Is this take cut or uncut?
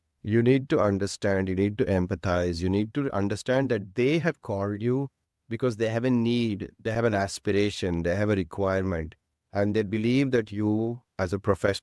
uncut